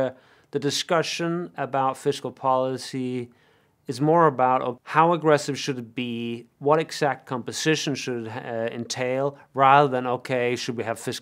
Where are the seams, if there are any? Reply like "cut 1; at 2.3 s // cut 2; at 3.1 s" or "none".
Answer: cut 1; at 4.8 s